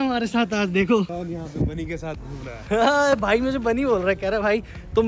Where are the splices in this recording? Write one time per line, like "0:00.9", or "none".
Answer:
0:01.1